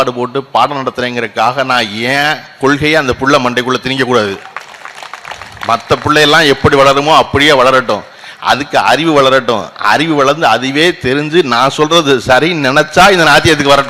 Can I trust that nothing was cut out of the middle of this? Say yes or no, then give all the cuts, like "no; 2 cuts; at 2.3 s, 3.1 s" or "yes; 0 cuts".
yes; 0 cuts